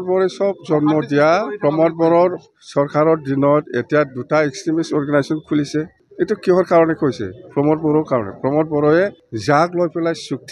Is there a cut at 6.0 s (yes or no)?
yes